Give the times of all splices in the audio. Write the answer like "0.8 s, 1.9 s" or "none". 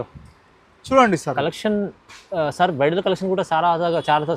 none